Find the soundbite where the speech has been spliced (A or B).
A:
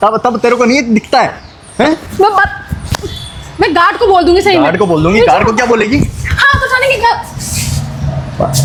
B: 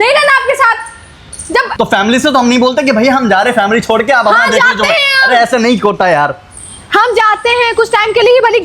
B